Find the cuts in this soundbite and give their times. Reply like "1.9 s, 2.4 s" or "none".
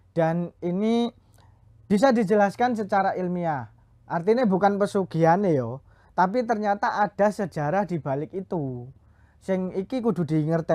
none